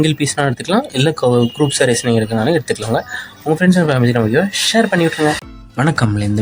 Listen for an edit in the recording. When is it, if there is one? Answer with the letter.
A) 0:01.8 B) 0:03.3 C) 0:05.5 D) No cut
C